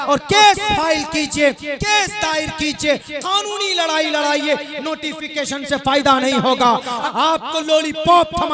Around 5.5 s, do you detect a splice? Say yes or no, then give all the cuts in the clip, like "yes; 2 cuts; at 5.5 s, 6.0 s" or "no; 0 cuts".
no; 1 cut; at 7.0 s